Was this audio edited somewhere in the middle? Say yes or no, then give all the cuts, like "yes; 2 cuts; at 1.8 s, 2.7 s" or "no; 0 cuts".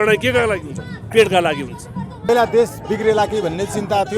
yes; 1 cut; at 2.3 s